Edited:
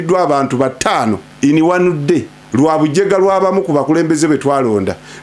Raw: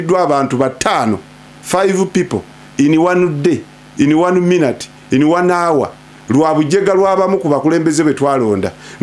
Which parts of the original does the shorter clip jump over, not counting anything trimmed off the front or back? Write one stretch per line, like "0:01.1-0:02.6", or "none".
0:01.3-0:02.6
0:03.7-0:06.1